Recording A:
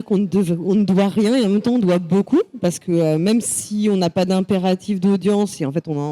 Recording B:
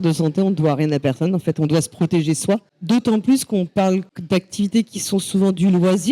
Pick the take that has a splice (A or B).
B